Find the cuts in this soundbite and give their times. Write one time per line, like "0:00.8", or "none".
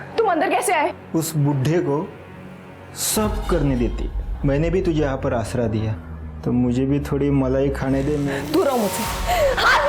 0:08.4